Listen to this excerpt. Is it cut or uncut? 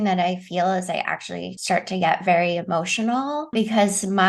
cut